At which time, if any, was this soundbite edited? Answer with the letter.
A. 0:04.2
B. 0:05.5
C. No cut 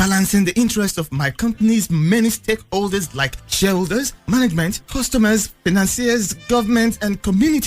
B